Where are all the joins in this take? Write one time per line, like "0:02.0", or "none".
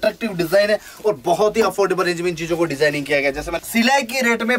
0:03.5

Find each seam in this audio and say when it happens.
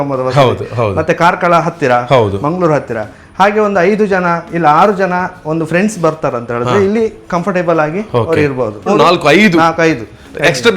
0:08.9

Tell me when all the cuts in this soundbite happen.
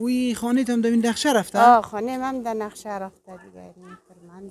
none

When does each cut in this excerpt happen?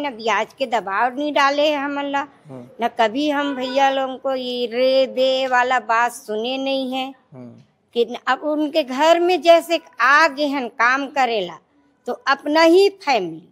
none

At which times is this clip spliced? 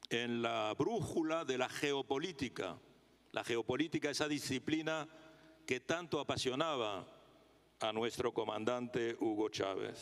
0:08.2

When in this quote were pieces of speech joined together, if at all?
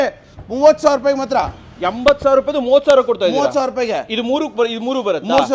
none

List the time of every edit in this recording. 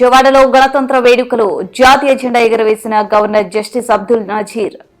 none

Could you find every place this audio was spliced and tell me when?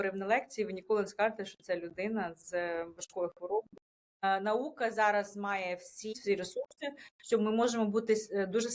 0:04.2
0:06.2

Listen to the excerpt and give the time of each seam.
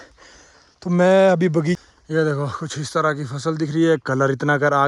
0:01.8

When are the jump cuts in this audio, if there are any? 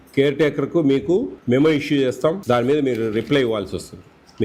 0:01.4
0:02.4

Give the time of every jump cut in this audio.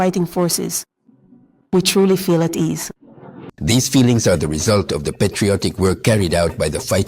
0:03.5

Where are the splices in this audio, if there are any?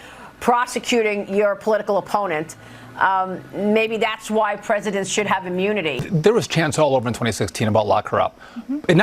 0:06.0

